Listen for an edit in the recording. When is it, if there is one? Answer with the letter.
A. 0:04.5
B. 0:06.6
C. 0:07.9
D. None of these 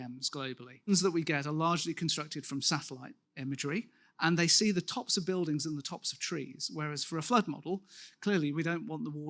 D